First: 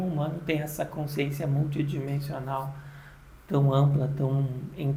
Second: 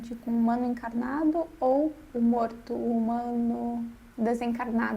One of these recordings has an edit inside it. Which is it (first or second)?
second